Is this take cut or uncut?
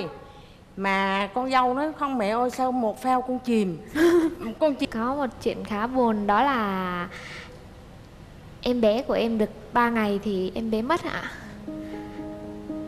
cut